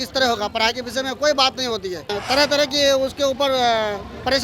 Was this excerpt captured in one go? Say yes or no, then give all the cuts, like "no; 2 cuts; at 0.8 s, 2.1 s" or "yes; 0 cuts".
no; 1 cut; at 2.2 s